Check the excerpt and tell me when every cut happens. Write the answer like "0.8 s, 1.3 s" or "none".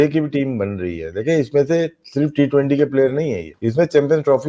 3.5 s